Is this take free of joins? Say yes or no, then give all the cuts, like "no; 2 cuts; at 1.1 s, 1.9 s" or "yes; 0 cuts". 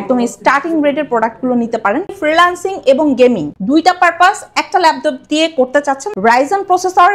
no; 3 cuts; at 2.1 s, 3.5 s, 6.1 s